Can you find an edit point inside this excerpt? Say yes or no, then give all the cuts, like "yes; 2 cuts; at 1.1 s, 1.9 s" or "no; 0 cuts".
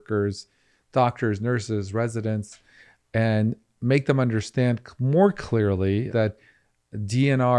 yes; 1 cut; at 6.1 s